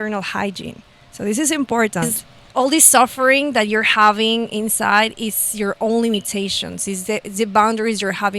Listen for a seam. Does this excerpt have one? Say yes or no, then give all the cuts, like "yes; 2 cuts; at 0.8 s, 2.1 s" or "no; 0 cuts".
yes; 1 cut; at 2.2 s